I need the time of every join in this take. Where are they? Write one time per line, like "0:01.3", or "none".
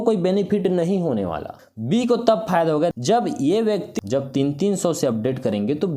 0:01.5
0:02.9
0:03.9